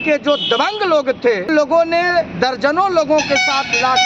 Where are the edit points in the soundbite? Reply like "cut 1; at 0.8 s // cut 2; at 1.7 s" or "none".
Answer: cut 1; at 1.5 s